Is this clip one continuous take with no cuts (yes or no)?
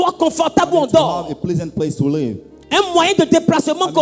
yes